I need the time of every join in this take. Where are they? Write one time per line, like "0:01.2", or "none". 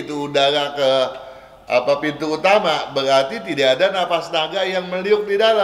none